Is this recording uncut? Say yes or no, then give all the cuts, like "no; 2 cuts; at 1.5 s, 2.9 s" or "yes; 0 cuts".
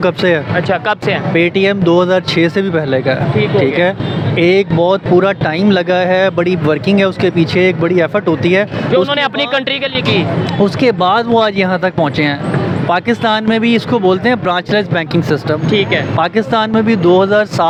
yes; 0 cuts